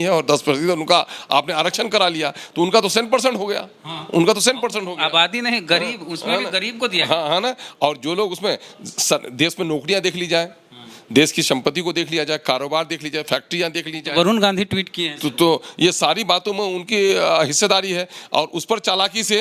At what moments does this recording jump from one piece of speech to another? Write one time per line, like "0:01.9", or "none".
none